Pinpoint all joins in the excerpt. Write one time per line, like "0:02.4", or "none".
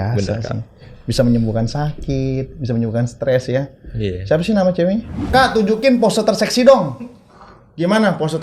0:05.1